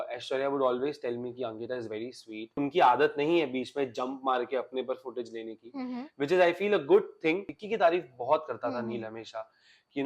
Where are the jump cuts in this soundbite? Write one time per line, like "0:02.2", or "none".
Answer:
0:02.6
0:07.6

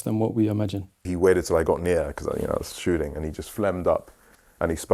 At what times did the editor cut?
0:00.9

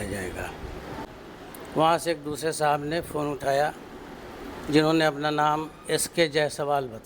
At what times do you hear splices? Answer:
0:01.1

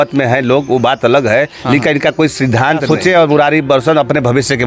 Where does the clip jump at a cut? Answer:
0:02.8

